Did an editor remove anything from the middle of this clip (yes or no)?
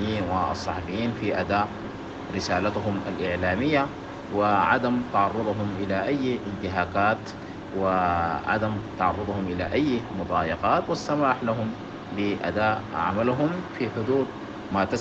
no